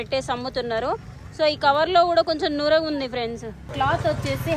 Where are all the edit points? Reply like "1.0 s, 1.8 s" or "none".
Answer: 3.6 s